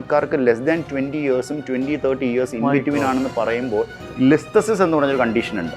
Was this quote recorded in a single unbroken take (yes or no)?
no